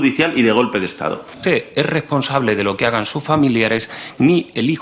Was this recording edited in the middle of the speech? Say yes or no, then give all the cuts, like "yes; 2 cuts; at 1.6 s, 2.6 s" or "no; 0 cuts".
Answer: yes; 1 cut; at 1.4 s